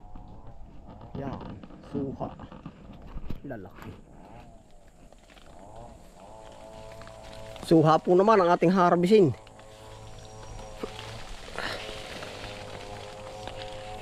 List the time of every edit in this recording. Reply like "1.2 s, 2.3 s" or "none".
none